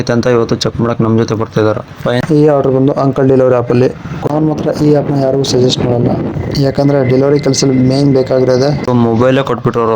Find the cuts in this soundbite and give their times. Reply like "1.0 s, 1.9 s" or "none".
2.2 s, 4.3 s, 8.9 s